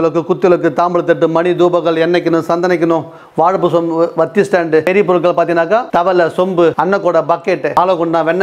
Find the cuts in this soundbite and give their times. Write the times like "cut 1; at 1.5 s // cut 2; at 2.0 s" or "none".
cut 1; at 4.9 s // cut 2; at 5.9 s // cut 3; at 6.8 s // cut 4; at 7.8 s